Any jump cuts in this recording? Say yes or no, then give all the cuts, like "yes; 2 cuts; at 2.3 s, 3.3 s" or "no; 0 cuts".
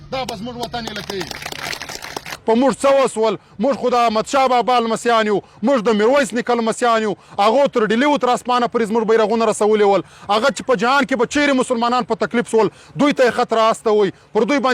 yes; 1 cut; at 2.3 s